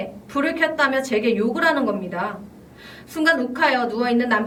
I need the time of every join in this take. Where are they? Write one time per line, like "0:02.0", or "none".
none